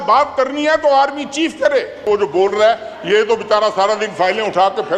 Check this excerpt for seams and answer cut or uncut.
cut